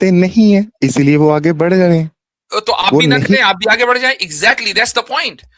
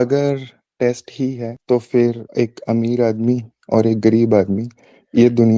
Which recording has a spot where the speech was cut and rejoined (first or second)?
second